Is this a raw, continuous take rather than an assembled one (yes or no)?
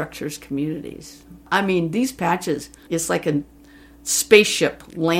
no